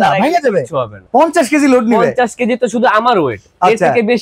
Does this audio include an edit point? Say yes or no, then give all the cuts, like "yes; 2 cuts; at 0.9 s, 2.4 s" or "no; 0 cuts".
yes; 1 cut; at 0.9 s